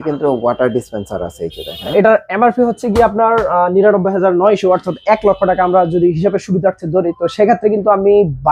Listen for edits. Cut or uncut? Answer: cut